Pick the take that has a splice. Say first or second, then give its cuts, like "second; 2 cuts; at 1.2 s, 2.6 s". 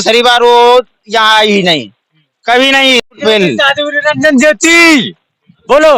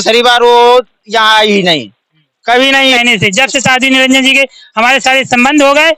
second; 1 cut; at 3.0 s